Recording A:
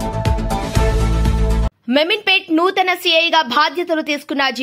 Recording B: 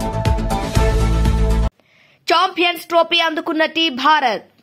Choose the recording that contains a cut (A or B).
A